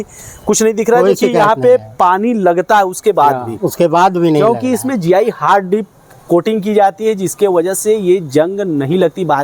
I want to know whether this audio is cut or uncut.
uncut